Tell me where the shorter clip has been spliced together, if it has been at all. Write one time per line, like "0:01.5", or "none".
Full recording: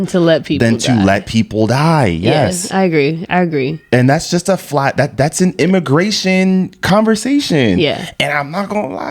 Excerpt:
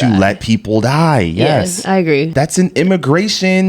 0:02.3